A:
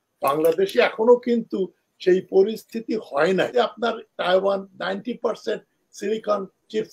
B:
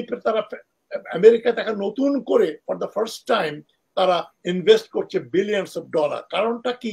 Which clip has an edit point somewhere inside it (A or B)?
A